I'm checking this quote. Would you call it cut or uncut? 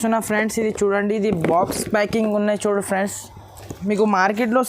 cut